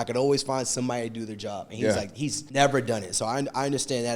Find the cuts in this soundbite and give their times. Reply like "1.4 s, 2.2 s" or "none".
2.4 s